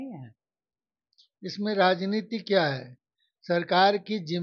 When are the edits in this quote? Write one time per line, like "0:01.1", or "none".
none